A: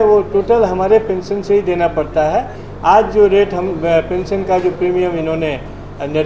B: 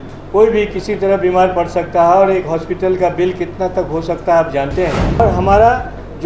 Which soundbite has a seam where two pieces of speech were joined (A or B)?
B